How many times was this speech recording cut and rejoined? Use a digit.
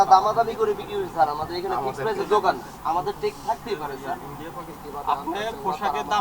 1